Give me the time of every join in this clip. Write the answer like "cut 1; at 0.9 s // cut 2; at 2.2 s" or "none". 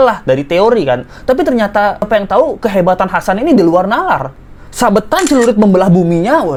none